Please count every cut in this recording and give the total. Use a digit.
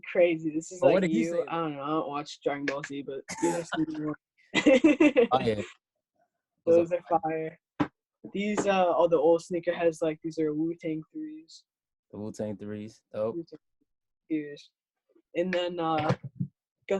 1